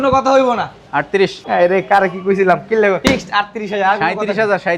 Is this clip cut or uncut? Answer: cut